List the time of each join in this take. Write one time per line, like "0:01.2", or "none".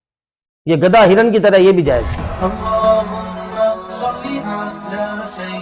0:02.2